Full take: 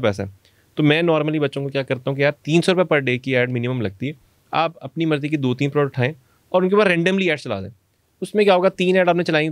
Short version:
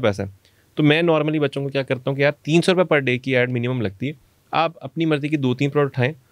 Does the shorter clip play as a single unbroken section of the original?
yes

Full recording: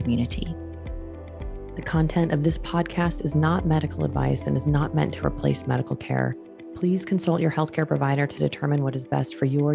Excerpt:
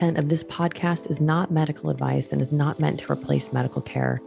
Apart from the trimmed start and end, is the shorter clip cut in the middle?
no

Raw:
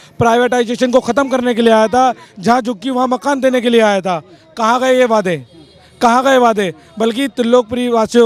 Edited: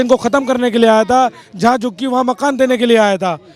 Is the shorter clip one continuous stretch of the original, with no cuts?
yes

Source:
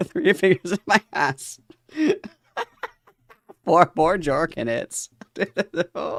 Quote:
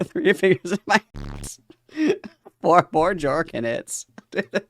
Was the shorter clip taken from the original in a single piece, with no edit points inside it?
no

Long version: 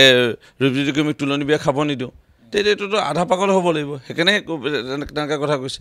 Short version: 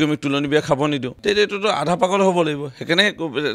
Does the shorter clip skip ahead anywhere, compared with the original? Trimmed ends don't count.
yes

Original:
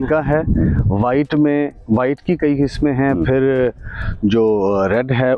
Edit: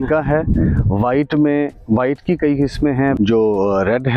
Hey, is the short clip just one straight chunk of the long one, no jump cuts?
no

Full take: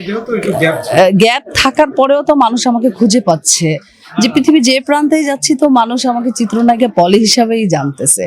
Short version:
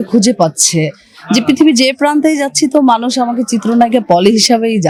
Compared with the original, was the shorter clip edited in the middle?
no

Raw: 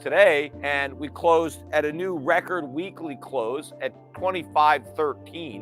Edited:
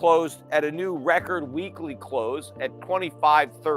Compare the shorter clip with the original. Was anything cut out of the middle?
yes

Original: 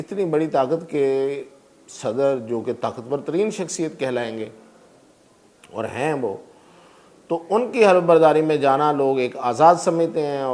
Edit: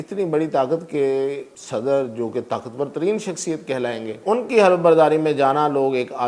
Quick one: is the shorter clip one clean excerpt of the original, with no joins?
no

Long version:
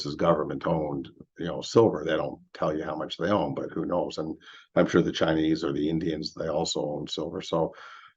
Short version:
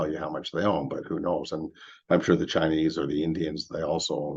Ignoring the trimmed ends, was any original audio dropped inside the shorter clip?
no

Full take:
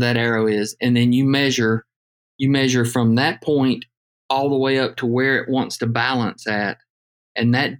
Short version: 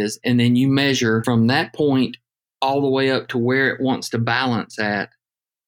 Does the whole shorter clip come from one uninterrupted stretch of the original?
no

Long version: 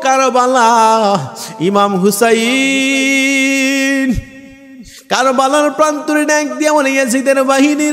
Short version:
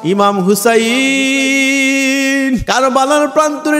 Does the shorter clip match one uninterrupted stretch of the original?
no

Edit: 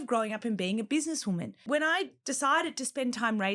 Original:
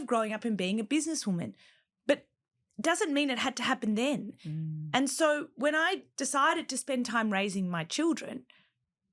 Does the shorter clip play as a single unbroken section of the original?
no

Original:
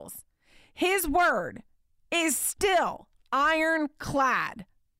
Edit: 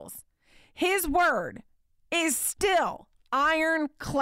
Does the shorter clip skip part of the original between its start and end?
no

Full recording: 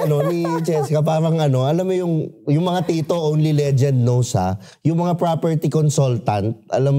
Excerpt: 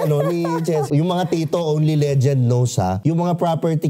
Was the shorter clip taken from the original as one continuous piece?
no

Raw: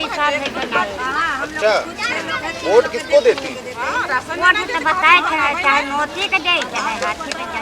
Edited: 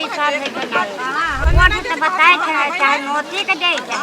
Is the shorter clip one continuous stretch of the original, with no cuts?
no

